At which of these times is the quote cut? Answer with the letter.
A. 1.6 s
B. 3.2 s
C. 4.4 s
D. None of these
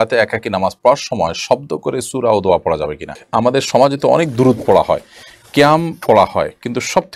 B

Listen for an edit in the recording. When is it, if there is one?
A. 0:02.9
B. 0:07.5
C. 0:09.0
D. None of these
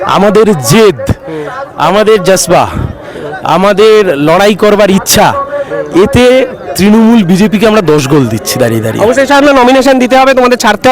D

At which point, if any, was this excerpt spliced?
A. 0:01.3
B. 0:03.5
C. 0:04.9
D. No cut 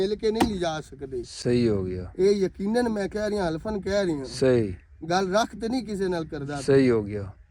D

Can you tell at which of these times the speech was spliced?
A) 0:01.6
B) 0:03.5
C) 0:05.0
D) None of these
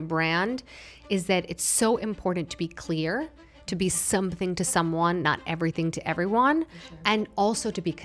D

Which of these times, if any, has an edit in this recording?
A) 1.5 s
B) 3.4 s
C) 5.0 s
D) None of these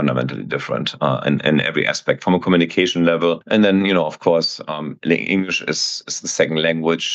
B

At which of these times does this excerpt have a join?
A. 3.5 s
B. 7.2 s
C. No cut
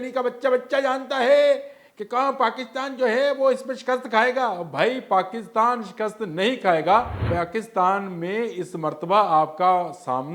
B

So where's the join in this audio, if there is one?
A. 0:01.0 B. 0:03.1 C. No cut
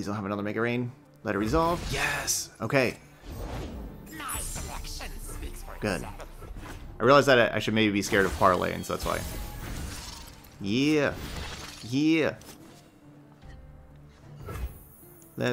A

